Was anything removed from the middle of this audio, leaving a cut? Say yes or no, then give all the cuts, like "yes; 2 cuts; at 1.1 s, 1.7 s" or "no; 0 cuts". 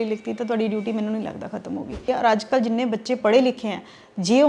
yes; 1 cut; at 2.0 s